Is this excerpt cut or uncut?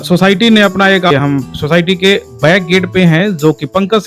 cut